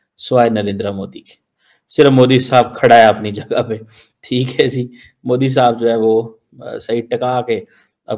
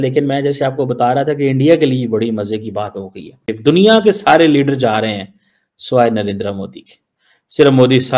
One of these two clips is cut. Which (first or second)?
second